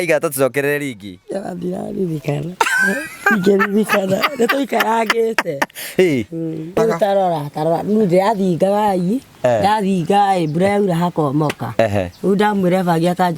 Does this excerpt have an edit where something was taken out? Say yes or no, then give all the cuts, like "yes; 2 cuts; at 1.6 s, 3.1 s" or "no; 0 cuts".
yes; 1 cut; at 6.8 s